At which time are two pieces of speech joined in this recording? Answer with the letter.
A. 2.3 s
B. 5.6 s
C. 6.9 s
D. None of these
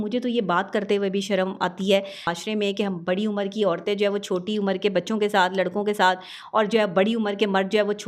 A